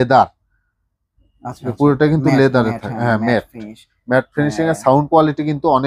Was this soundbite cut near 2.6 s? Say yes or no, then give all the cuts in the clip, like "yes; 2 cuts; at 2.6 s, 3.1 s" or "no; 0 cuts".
no; 0 cuts